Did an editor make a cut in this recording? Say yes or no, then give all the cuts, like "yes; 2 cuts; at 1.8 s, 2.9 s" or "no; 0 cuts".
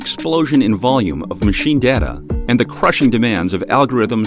no; 0 cuts